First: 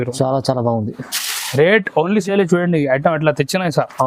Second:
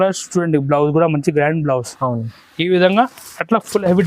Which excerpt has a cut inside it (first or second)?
first